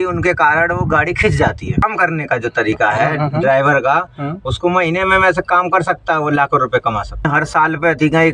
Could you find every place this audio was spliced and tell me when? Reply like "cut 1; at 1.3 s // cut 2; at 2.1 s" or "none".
cut 1; at 1.8 s // cut 2; at 7.3 s